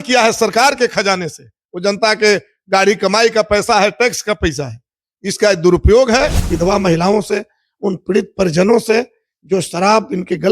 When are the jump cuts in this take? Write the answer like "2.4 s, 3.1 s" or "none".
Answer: 6.5 s